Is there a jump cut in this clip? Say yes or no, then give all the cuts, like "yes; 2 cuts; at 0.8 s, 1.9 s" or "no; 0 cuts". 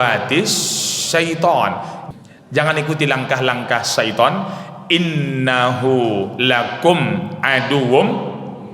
yes; 1 cut; at 1.9 s